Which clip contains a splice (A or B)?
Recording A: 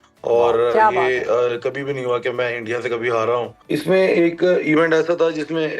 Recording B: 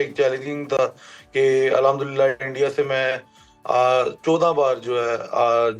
A